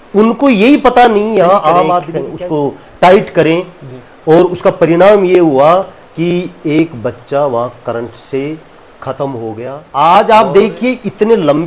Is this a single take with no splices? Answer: no; 2 cuts; at 2.2 s, 9.8 s

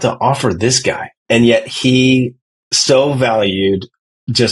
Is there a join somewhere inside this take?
yes; 1 cut; at 1.2 s

